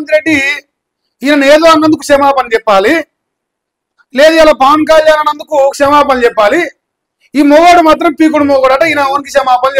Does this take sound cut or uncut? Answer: uncut